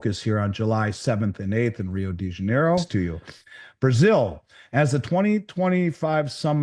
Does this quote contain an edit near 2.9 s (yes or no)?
yes